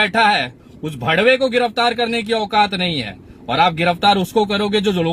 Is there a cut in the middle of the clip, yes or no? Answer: no